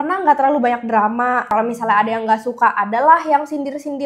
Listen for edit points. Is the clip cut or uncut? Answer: cut